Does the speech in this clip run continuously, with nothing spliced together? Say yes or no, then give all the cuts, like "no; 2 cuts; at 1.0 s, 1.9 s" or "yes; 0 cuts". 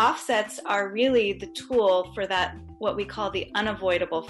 yes; 0 cuts